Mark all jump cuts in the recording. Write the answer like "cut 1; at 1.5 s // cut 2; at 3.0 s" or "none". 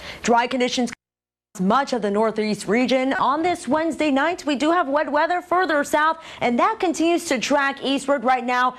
cut 1; at 1.5 s